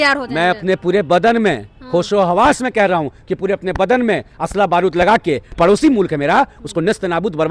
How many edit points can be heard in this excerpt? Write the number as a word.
zero